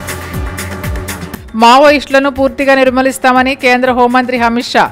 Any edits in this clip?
yes; 1 cut; at 1.2 s

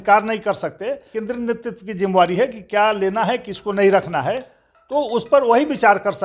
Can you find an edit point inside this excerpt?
yes; 1 cut; at 1.1 s

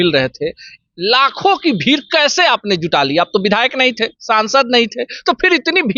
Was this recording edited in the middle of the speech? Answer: no; 0 cuts

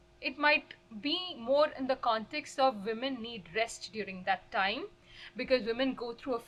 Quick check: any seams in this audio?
no; 0 cuts

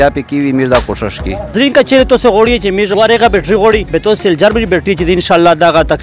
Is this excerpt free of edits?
no; 3 cuts; at 1.5 s, 2.9 s, 3.9 s

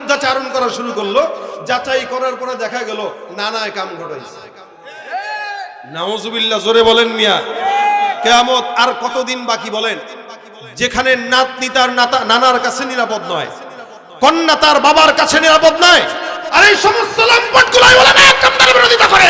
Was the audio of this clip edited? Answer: no; 0 cuts

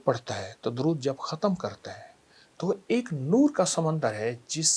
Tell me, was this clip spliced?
no; 0 cuts

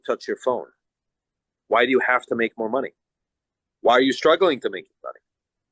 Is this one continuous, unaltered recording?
yes; 0 cuts

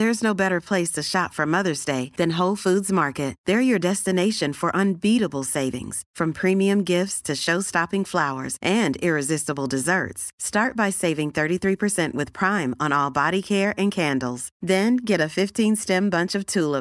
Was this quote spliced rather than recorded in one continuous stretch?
no; 0 cuts

